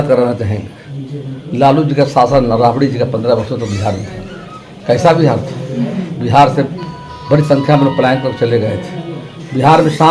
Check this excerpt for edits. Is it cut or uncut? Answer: uncut